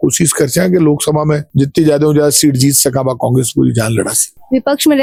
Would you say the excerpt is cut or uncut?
uncut